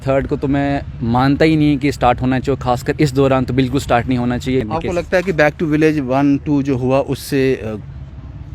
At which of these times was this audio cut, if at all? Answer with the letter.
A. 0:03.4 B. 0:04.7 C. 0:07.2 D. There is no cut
B